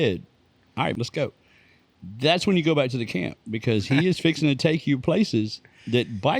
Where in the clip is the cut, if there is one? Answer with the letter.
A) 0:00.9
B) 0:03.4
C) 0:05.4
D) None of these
A